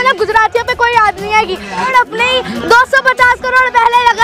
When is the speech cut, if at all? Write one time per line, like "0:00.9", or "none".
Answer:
0:01.9

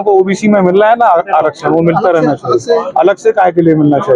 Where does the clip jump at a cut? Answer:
none

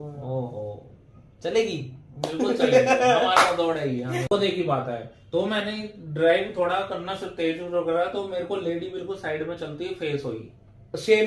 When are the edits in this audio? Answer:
0:04.3

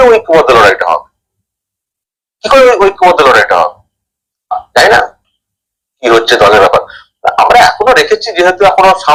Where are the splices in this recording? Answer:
none

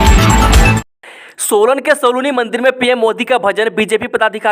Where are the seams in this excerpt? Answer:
0:00.9

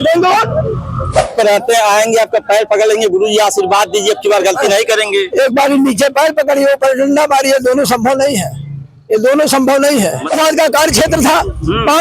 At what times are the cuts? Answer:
0:01.3
0:10.4

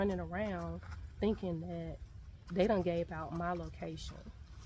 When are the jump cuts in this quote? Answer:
none

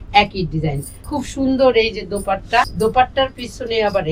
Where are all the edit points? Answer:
0:00.9
0:02.7

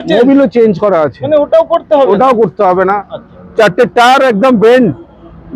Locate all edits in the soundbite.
none

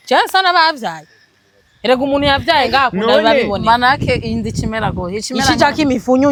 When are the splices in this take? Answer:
none

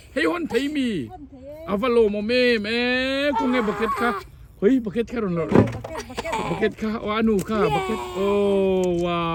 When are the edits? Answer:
none

